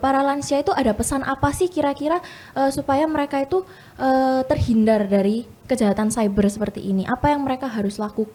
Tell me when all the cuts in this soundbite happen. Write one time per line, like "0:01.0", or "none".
none